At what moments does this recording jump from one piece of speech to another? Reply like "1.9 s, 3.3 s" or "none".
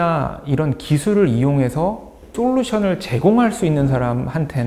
2.3 s

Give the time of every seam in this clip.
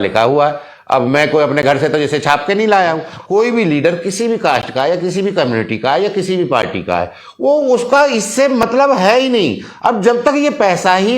3.1 s

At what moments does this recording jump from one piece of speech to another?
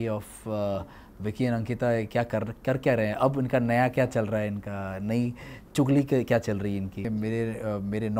7.0 s

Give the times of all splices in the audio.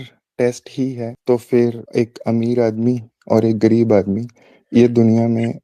1.1 s, 1.8 s

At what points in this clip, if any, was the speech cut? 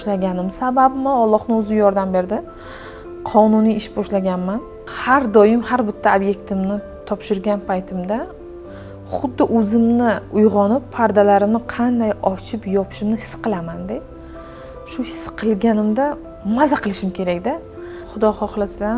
4.8 s, 18.0 s

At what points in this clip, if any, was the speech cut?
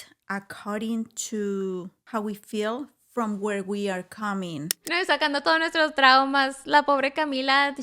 2.0 s, 4.8 s

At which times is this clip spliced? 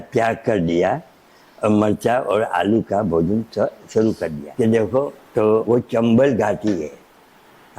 4.4 s

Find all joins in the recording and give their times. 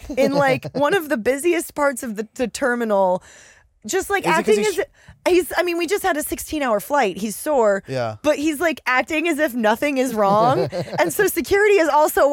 none

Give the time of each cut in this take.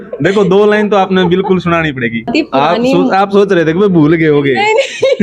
2.3 s

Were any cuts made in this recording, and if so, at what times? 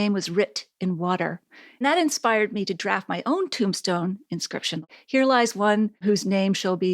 1.8 s, 4.9 s, 6.0 s

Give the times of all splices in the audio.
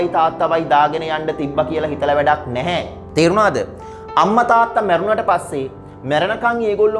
none

